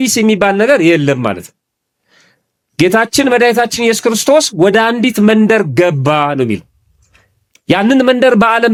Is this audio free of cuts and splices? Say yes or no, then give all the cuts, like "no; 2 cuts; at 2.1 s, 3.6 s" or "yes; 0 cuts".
yes; 0 cuts